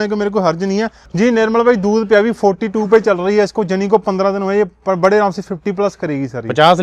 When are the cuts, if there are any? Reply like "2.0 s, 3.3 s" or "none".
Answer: 1.1 s